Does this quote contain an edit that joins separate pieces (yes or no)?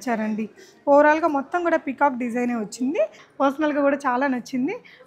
yes